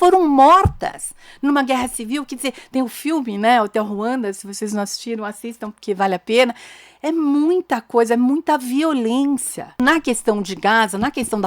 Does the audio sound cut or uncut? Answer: cut